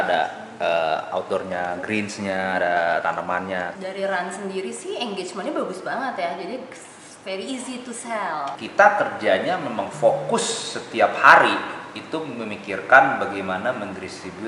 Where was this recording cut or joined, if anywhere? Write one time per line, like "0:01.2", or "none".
0:03.7
0:08.5